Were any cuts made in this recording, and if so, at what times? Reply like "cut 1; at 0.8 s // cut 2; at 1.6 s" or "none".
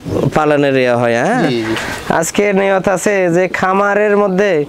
cut 1; at 1.8 s